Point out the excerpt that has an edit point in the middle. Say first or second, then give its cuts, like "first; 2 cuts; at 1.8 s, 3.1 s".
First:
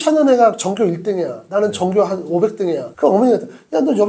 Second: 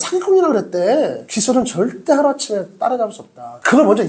second; 1 cut; at 1.2 s